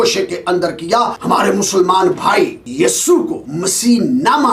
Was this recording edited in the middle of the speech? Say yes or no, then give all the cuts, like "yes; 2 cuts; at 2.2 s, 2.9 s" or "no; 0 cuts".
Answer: yes; 3 cuts; at 1.2 s, 2.6 s, 3.4 s